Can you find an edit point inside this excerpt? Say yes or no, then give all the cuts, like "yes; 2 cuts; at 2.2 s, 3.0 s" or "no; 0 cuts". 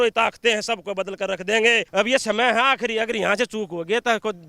yes; 1 cut; at 1.8 s